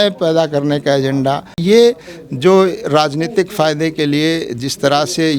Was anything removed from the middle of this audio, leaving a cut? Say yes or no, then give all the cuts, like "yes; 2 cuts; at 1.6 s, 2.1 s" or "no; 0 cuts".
yes; 1 cut; at 1.6 s